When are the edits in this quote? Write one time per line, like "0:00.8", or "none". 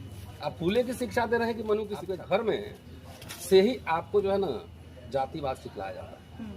0:02.0